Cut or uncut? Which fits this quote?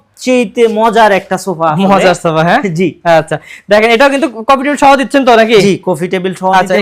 uncut